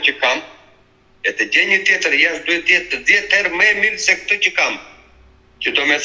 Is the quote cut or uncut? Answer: uncut